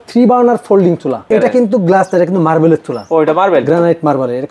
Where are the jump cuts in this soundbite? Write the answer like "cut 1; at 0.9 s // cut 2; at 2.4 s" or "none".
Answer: cut 1; at 1.3 s